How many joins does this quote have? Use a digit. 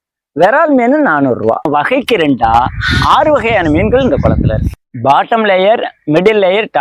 2